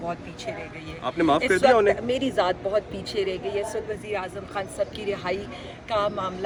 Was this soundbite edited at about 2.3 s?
no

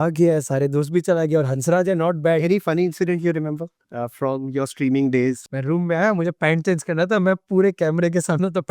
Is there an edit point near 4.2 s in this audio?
no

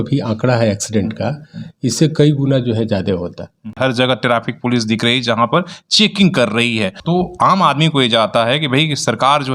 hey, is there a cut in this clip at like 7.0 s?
yes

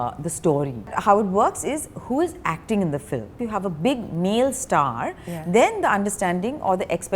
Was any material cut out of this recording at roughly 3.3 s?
yes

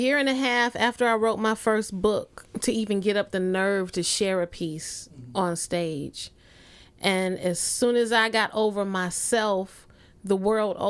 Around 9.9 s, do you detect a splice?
no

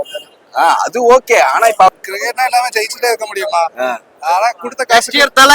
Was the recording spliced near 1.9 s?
yes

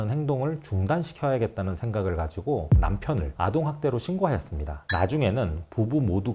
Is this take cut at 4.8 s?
yes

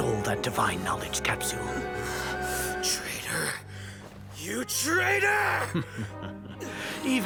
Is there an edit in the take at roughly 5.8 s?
no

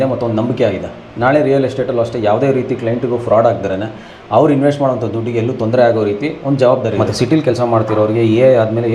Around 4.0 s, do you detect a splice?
no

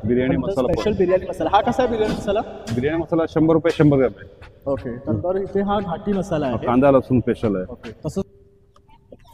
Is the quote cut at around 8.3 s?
yes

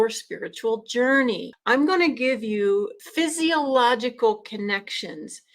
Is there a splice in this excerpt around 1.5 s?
yes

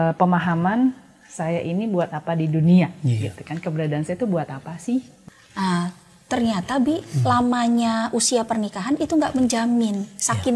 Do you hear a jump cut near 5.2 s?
yes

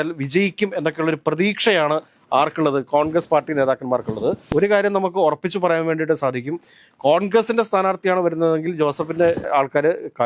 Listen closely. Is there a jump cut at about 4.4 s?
yes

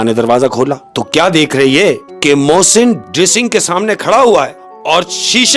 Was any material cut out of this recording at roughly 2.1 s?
yes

